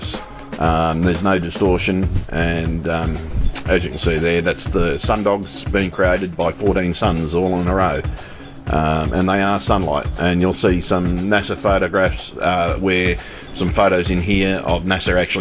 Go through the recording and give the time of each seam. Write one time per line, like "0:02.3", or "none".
0:04.6